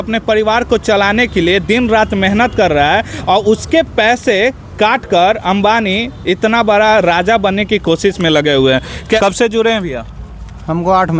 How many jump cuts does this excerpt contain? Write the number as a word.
one